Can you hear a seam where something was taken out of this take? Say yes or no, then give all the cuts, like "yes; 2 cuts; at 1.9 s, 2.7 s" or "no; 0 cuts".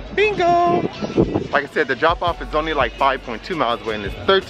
no; 0 cuts